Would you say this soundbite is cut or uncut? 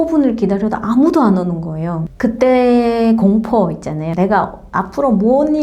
cut